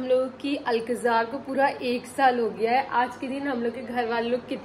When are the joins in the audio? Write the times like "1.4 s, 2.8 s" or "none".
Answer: none